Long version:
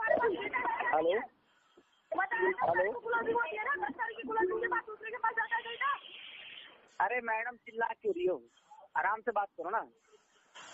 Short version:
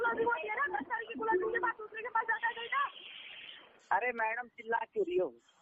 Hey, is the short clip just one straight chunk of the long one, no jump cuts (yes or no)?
yes